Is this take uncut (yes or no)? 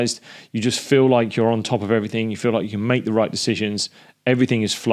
yes